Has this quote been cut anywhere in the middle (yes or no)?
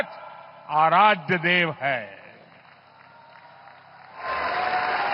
no